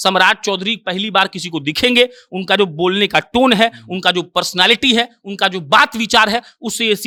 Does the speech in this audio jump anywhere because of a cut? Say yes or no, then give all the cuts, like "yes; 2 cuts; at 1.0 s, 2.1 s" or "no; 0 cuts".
no; 0 cuts